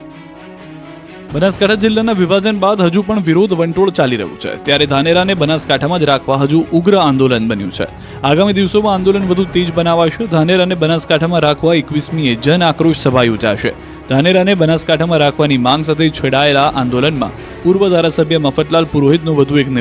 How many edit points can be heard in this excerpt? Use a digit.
1